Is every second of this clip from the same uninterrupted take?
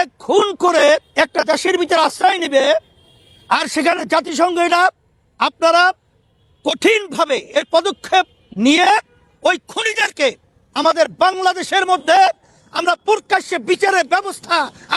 yes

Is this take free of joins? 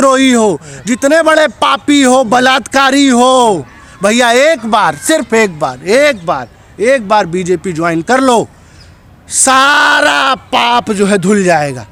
yes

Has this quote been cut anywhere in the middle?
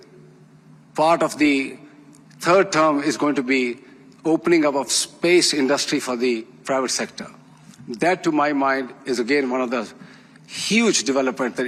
no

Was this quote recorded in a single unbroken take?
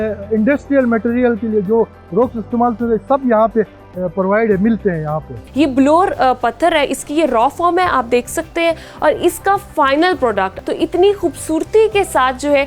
no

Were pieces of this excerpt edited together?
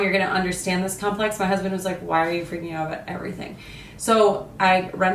no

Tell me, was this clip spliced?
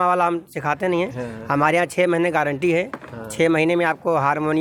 no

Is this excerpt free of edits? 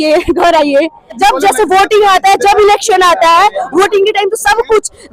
no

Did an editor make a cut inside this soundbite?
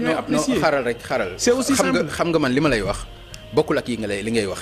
no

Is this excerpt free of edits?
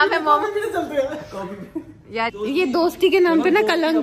no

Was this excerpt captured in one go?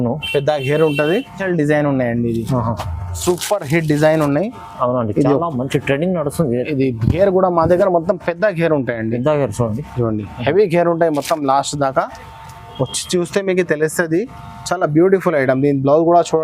no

